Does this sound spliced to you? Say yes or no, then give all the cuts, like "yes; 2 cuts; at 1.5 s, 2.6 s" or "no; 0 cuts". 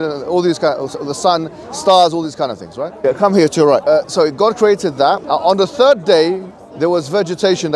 yes; 3 cuts; at 2.9 s, 4.0 s, 5.2 s